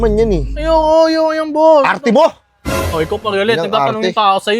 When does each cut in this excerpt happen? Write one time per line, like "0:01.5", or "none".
none